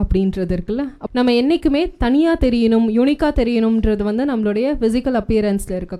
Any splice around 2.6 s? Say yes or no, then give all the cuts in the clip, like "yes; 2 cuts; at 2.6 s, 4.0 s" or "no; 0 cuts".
no; 1 cut; at 1.0 s